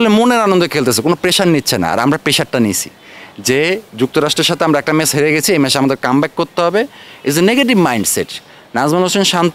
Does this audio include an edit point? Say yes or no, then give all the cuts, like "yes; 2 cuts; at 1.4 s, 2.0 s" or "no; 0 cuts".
no; 0 cuts